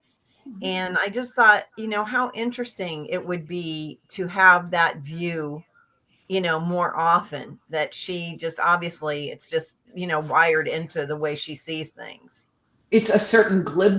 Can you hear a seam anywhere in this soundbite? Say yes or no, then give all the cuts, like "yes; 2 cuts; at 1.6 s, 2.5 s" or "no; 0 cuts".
no; 0 cuts